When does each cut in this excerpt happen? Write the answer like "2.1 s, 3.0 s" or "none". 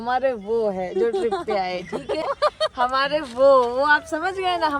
2.2 s